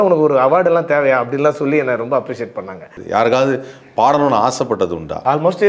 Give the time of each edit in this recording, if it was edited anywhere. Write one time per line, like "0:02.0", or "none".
0:03.0